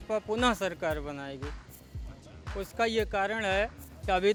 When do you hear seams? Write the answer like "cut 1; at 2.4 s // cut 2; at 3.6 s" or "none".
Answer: none